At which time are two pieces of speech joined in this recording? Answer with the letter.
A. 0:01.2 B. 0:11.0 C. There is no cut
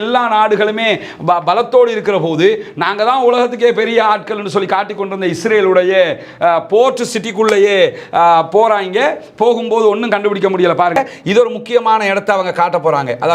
B